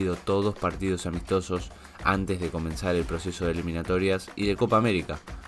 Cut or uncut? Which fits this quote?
uncut